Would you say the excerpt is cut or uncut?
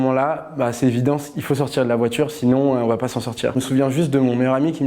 cut